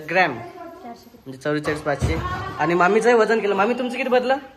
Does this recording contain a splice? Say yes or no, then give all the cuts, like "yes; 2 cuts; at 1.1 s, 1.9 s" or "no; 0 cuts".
no; 0 cuts